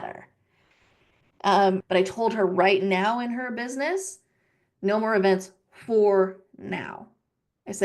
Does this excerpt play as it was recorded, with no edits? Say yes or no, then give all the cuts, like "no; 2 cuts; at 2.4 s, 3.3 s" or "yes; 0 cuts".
no; 1 cut; at 1.8 s